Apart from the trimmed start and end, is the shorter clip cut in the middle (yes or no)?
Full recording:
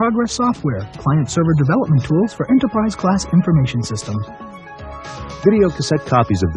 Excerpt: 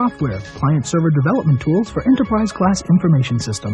no